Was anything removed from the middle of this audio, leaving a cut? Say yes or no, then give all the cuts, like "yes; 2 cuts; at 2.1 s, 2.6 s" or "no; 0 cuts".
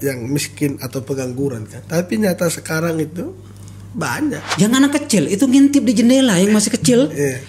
yes; 2 cuts; at 1.8 s, 4.4 s